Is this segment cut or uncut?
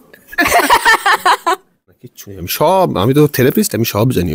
cut